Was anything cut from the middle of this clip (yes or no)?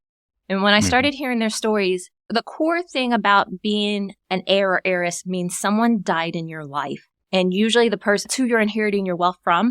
yes